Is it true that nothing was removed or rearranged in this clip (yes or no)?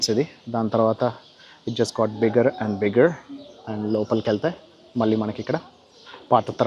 yes